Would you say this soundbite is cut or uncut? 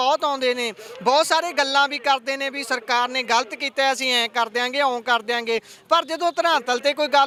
uncut